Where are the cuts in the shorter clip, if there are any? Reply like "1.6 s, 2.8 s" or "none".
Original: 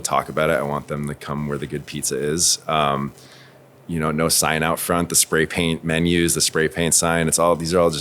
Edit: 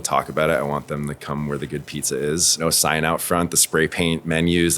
2.6 s